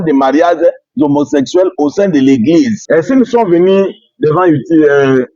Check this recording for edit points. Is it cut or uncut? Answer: cut